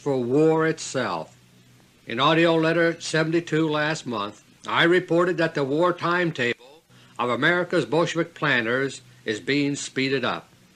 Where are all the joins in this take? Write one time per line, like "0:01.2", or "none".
0:08.1